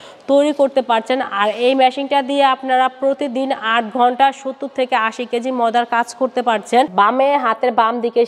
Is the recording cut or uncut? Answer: cut